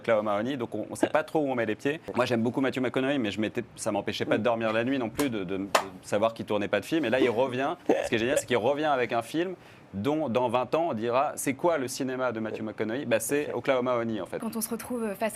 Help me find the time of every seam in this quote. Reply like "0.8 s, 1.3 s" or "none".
2.0 s, 14.4 s